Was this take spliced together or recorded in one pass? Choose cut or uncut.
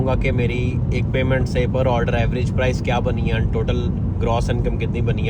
uncut